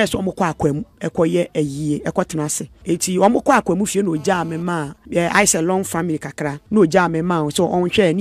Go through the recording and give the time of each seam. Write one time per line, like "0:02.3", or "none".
0:00.9
0:02.7
0:05.0
0:06.6